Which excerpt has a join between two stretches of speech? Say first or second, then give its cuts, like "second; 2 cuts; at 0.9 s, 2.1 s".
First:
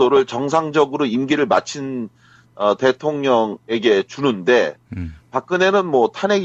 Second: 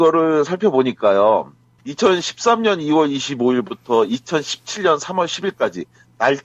first; 1 cut; at 3.6 s